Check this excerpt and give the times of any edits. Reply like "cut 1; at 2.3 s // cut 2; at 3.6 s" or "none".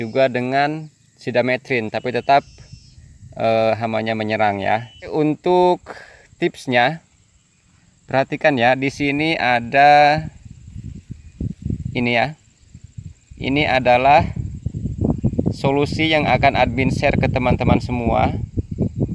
cut 1; at 5.1 s